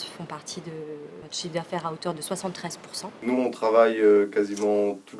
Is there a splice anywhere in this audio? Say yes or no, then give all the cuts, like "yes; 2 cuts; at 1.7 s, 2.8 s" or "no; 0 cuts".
yes; 2 cuts; at 1.3 s, 3.2 s